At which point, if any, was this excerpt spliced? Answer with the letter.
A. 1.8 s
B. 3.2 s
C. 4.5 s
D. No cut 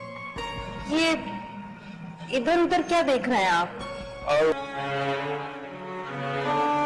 C